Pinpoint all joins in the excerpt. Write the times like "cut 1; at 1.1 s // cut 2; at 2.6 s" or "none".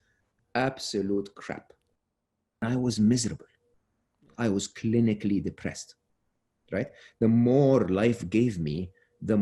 cut 1; at 2.3 s

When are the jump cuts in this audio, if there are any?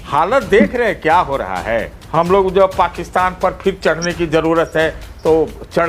cut 1; at 2.0 s

